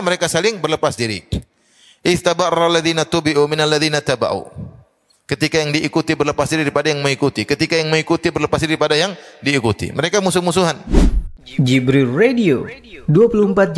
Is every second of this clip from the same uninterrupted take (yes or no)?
no